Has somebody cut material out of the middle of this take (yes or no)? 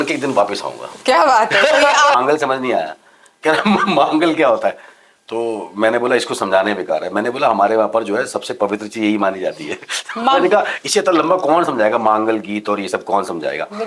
yes